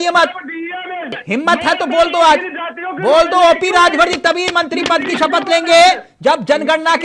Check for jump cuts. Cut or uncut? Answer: cut